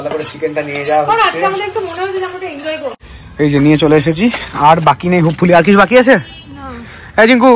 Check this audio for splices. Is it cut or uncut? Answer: cut